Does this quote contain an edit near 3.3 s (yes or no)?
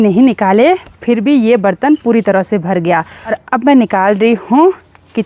yes